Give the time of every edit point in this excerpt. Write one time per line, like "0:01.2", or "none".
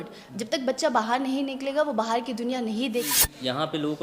0:03.1